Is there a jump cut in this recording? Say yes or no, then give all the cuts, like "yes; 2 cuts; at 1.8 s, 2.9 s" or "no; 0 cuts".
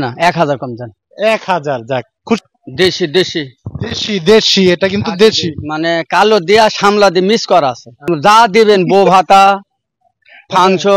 yes; 2 cuts; at 2.4 s, 8.1 s